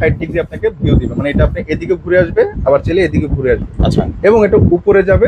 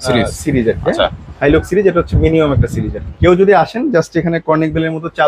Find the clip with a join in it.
second; 1 cut; at 3.0 s

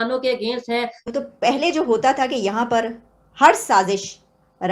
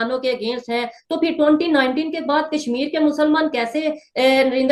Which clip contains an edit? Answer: first; 1 cut; at 1.0 s

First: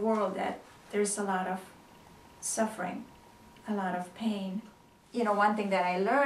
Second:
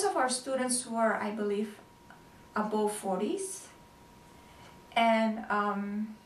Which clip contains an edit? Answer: first; 1 cut; at 5.0 s

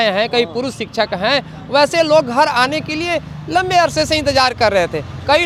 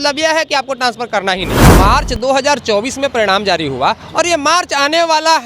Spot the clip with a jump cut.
second; 1 cut; at 1.6 s

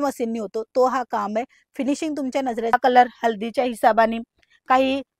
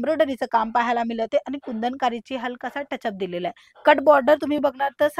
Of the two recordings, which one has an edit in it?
first; 1 cut; at 2.7 s

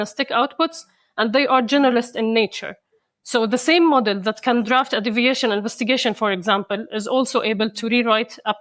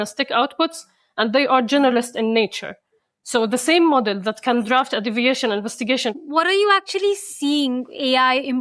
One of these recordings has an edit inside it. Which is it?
second; 1 cut; at 6.2 s

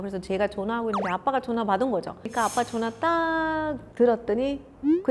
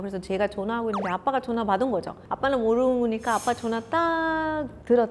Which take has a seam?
first; 1 cut; at 2.3 s

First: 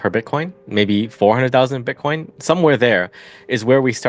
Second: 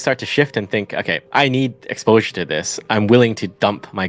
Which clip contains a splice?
second; 1 cut; at 1.2 s

